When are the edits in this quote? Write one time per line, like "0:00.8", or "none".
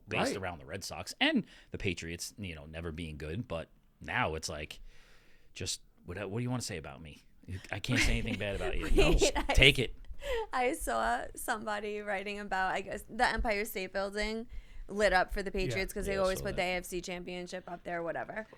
none